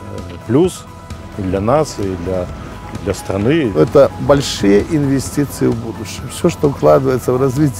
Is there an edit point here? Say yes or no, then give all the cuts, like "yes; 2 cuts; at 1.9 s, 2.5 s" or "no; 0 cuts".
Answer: yes; 1 cut; at 3.8 s